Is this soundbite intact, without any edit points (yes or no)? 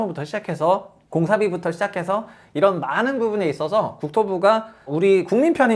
no